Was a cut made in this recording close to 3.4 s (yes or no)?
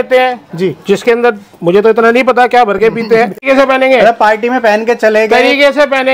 yes